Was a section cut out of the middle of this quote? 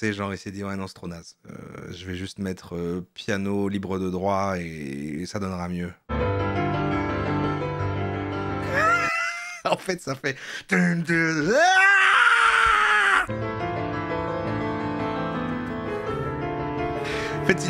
no; 0 cuts

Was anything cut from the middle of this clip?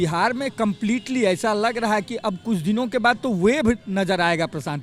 no; 0 cuts

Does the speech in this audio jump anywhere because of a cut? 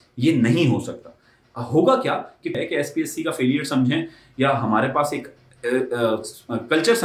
yes; 1 cut; at 2.5 s

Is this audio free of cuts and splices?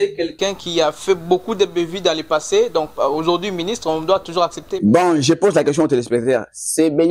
yes; 0 cuts

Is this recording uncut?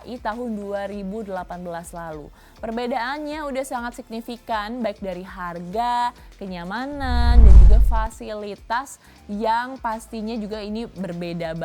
yes; 0 cuts

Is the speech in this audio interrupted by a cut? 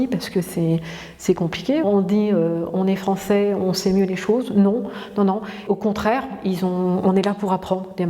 yes; 2 cuts; at 1.8 s, 5.7 s

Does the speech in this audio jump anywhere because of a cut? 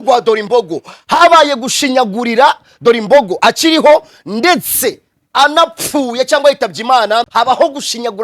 yes; 1 cut; at 7.3 s

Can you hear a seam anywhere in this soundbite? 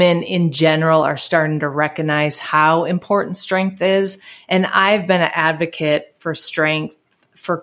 no; 0 cuts

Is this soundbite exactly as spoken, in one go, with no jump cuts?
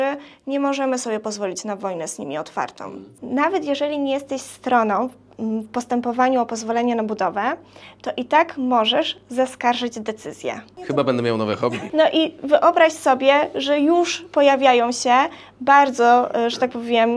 no; 2 cuts; at 3.2 s, 11.8 s

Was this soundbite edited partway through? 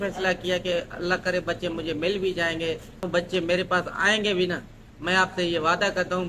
yes; 1 cut; at 3.1 s

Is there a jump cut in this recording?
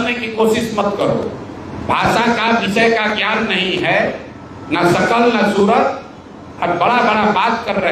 no; 0 cuts

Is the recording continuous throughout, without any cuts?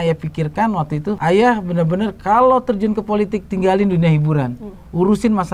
no; 1 cut; at 1.2 s

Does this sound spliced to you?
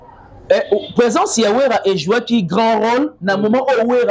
no; 0 cuts

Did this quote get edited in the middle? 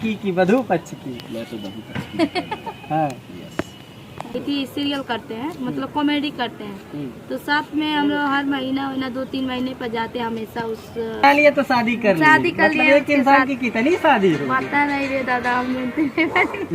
yes; 1 cut; at 4.3 s

